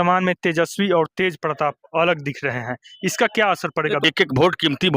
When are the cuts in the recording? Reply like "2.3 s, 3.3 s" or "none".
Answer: 4.0 s